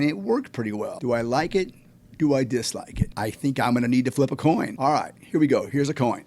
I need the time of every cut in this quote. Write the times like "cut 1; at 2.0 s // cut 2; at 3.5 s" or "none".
cut 1; at 1.0 s // cut 2; at 3.1 s // cut 3; at 4.7 s